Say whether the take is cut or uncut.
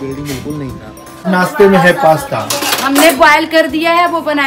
cut